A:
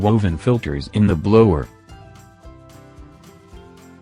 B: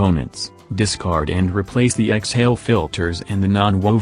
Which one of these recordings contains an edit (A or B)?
A